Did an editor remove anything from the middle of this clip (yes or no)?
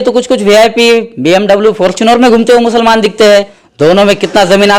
yes